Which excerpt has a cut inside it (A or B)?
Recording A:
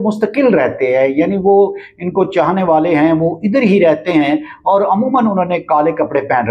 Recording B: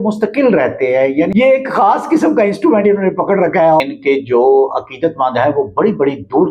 B